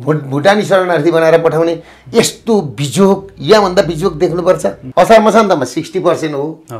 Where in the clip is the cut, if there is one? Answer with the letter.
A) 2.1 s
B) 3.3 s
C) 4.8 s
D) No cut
C